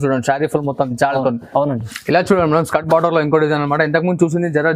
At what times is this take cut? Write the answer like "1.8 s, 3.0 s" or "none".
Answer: 1.9 s